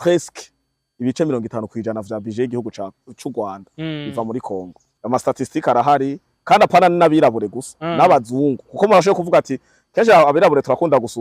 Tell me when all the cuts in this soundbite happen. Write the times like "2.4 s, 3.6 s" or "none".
4.8 s